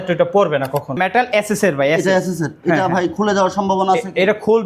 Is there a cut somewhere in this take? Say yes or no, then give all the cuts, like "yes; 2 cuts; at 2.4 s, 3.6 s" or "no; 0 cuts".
yes; 1 cut; at 0.9 s